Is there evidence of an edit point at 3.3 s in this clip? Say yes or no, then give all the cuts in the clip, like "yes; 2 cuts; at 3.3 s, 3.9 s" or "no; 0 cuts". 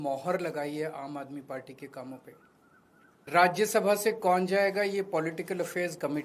yes; 1 cut; at 3.3 s